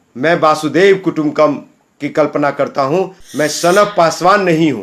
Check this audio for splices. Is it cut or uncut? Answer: cut